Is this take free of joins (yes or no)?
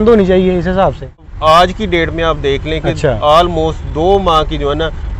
no